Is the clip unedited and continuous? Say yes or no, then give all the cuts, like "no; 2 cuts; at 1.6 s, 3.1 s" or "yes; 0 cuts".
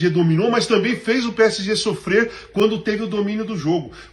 yes; 0 cuts